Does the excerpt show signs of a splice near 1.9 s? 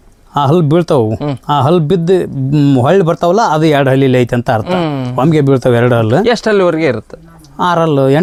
no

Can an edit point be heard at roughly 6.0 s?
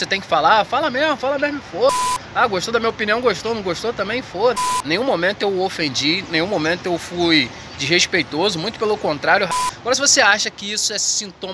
no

